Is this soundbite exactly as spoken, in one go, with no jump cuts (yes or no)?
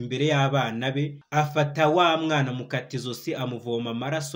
no